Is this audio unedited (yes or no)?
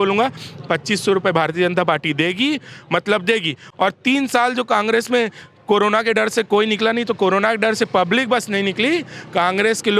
yes